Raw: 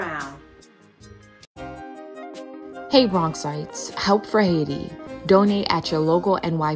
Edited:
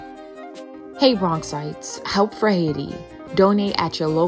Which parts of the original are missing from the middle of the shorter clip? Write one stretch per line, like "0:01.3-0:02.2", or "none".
0:02.8-0:02.9